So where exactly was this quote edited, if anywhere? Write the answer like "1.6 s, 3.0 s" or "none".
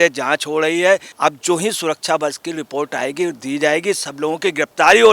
1.1 s